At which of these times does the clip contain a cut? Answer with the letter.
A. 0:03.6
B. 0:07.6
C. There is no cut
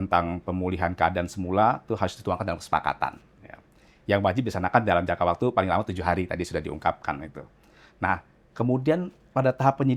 C